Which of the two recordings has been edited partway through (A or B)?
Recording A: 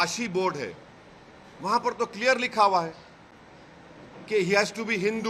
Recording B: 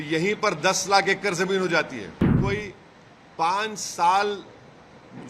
B